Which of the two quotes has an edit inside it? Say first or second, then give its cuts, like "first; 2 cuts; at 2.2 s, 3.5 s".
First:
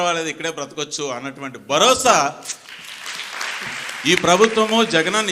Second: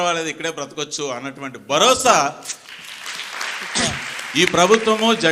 first; 1 cut; at 3.7 s